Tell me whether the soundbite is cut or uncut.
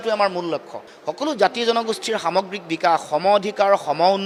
uncut